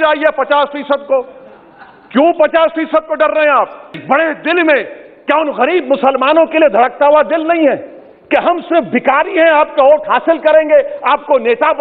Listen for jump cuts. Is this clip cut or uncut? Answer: cut